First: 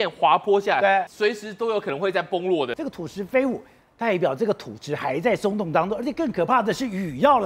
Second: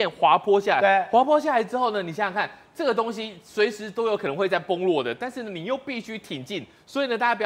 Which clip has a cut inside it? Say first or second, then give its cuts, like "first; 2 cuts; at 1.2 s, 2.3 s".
first; 2 cuts; at 1.1 s, 2.7 s